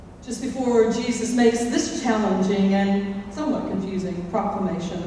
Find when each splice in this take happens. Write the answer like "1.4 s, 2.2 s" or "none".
1.6 s